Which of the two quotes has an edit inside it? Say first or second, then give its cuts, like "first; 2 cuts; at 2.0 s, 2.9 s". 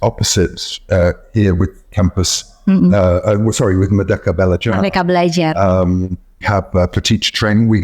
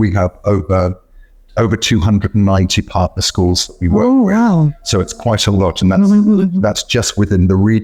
first; 1 cut; at 6.4 s